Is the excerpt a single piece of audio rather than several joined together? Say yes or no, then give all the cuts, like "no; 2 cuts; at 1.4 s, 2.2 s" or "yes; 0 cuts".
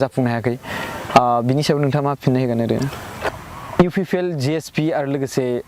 no; 1 cut; at 3.1 s